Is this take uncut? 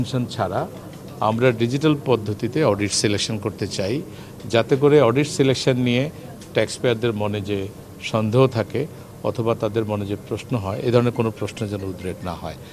yes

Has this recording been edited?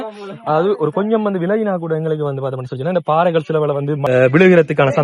yes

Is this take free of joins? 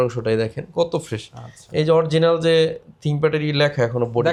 yes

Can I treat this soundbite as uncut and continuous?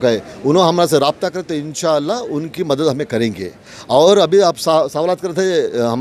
yes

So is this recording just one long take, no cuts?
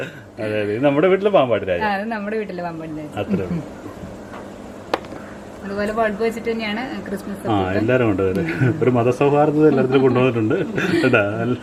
yes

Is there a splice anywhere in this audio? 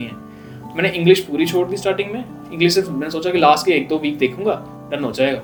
no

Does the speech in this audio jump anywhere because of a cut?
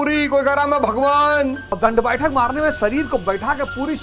yes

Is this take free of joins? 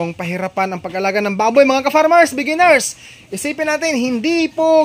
yes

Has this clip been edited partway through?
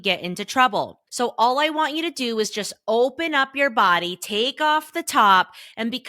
yes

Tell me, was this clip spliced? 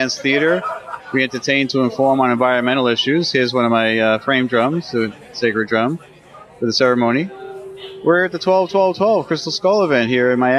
yes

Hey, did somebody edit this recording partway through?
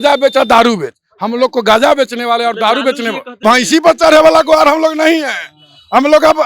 yes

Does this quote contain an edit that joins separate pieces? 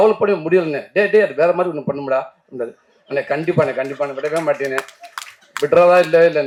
no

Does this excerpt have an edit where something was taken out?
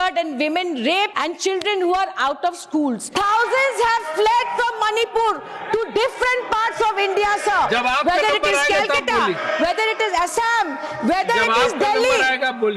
yes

